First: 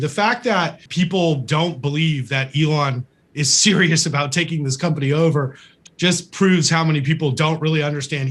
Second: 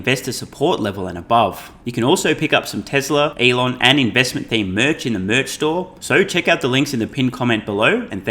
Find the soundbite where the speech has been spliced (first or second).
second